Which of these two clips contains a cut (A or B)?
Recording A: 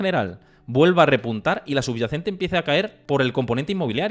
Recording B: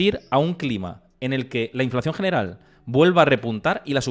A